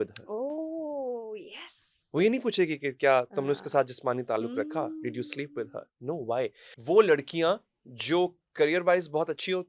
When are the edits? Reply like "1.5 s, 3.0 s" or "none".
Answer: 6.7 s